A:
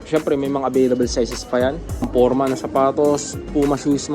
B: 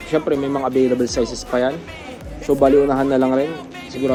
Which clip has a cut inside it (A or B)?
A